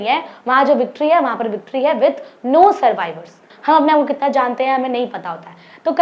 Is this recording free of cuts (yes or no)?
no